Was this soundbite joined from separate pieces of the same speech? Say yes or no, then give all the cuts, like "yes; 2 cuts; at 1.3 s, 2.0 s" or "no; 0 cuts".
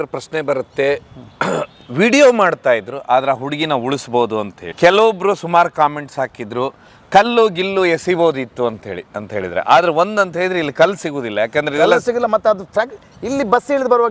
no; 0 cuts